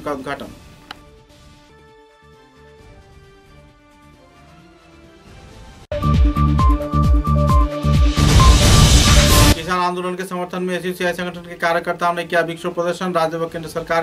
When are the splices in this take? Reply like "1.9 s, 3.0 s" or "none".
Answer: 5.9 s, 9.6 s